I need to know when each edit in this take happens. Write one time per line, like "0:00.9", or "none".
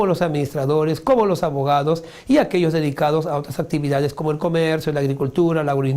0:04.8